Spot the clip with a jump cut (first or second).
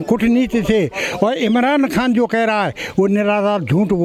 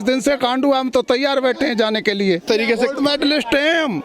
second